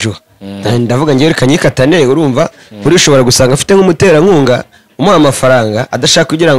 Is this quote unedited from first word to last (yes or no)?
yes